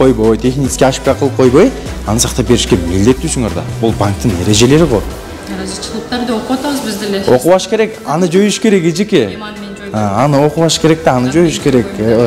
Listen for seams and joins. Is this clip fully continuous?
no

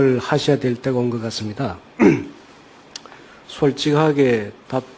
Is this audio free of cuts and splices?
yes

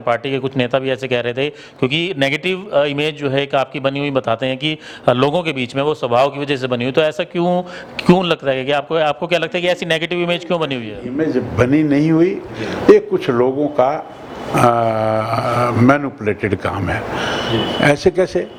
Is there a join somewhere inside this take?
no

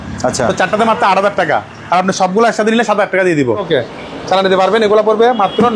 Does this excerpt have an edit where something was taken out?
yes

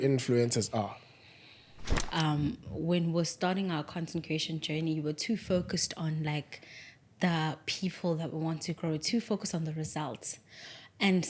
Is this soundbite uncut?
no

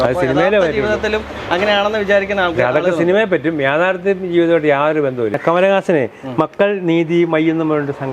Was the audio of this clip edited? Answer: yes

